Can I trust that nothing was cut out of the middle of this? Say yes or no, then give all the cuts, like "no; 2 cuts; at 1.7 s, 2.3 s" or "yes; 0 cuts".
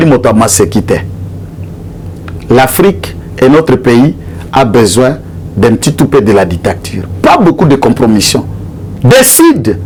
yes; 0 cuts